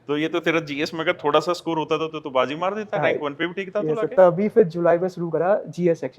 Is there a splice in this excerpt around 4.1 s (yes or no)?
no